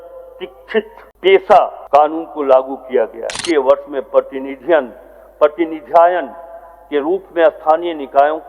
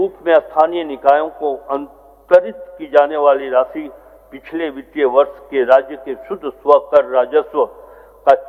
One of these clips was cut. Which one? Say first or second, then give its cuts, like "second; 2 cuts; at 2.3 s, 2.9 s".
first; 3 cuts; at 1.0 s, 1.8 s, 3.4 s